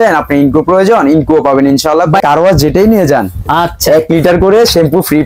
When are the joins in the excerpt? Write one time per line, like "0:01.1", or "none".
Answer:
0:02.2